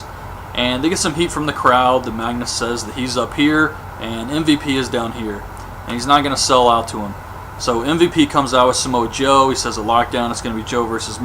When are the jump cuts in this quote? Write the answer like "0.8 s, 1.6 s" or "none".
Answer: 5.4 s